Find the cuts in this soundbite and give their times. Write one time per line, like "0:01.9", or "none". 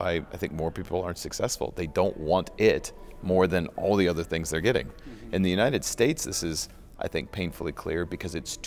none